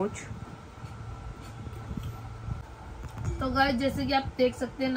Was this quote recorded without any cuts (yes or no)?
no